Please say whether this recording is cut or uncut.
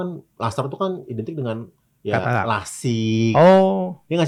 uncut